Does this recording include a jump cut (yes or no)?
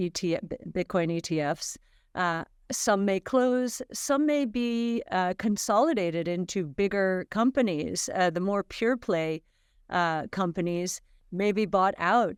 no